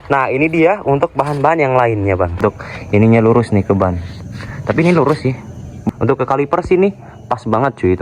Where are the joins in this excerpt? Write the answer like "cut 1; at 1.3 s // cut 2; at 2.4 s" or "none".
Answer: cut 1; at 2.4 s // cut 2; at 5.9 s